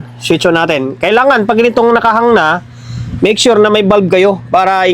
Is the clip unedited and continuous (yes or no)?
yes